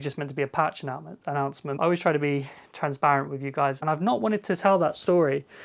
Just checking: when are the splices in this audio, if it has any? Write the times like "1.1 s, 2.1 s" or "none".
1.7 s, 3.8 s